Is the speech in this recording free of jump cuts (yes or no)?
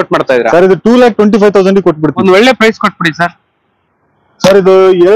no